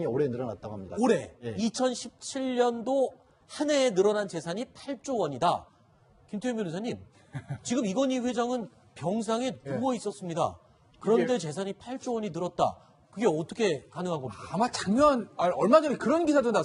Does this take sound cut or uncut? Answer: uncut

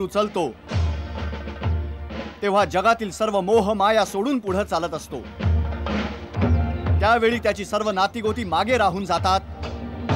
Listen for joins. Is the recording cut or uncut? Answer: uncut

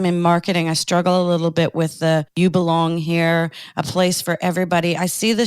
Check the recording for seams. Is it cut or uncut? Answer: cut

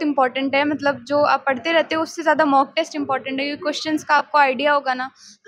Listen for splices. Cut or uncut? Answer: uncut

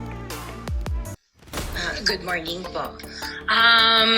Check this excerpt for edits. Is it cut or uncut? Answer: cut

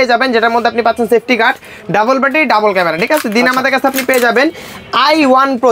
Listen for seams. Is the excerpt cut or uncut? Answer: uncut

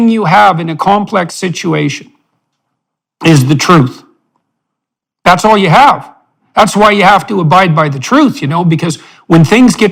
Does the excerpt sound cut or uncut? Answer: uncut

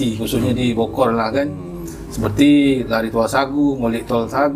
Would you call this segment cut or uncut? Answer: uncut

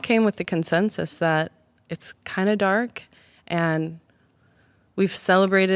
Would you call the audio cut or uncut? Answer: uncut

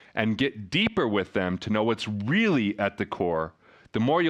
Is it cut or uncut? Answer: uncut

